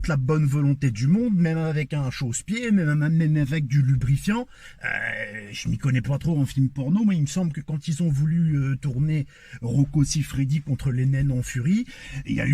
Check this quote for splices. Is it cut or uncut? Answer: uncut